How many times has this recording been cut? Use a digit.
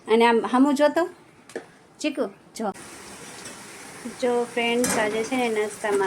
1